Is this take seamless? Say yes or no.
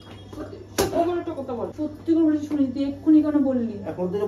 no